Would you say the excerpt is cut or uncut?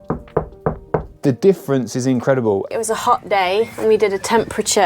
cut